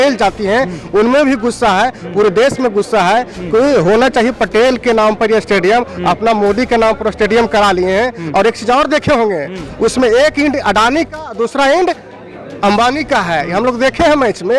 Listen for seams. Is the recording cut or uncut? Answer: uncut